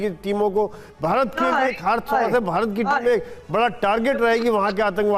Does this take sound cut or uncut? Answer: uncut